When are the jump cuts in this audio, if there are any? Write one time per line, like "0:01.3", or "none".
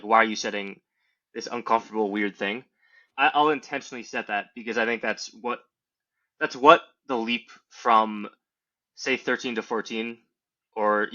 0:03.1